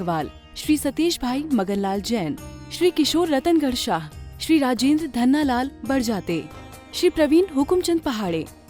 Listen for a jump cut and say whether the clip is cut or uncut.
uncut